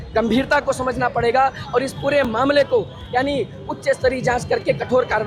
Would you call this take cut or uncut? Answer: uncut